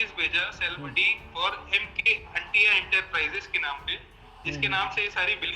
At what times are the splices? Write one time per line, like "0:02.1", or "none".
none